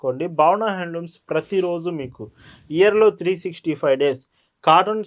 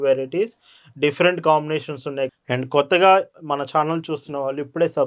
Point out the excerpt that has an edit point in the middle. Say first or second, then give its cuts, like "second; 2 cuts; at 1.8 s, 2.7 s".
second; 1 cut; at 2.3 s